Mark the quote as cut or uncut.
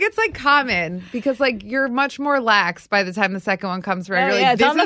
uncut